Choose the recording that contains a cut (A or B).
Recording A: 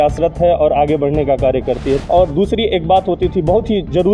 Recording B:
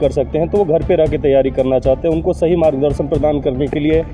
A